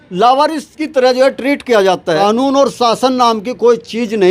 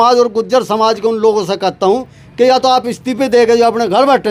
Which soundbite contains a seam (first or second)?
first